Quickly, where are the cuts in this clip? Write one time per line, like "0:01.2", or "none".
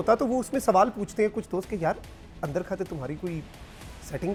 none